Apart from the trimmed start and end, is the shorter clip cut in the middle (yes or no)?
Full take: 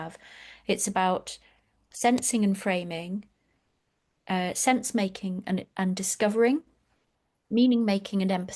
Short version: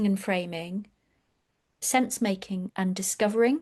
yes